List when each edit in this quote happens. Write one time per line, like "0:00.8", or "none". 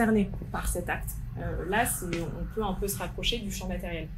none

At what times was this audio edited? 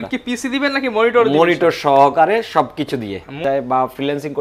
0:03.3

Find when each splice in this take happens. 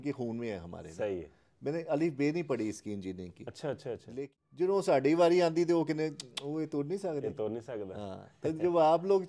0:04.2

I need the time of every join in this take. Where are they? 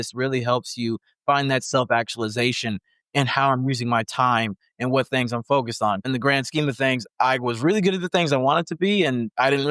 0:06.1

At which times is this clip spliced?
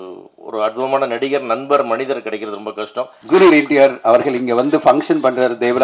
0:03.2

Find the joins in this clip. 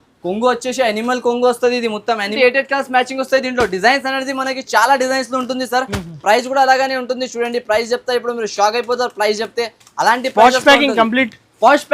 0:02.3

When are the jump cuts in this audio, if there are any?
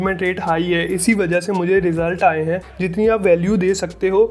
0:02.6

